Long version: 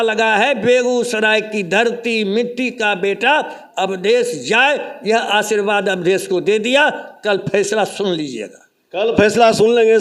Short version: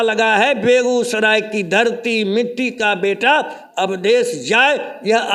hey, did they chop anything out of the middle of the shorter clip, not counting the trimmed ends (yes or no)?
no